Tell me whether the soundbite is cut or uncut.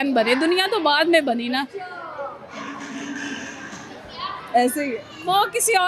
uncut